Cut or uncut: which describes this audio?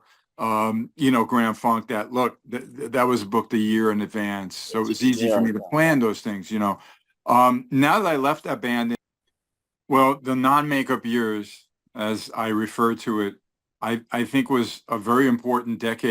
cut